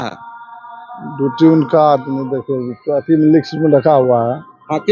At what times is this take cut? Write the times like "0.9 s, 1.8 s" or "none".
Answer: none